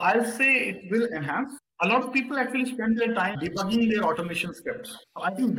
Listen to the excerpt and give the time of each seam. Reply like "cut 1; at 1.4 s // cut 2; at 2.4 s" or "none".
cut 1; at 1.7 s